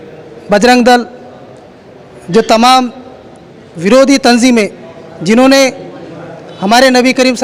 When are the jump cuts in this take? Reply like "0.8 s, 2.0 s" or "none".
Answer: none